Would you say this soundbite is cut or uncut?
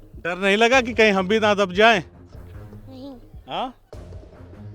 uncut